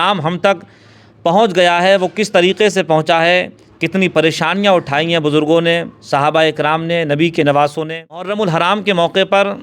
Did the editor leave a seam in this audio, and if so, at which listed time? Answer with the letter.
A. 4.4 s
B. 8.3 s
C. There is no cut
B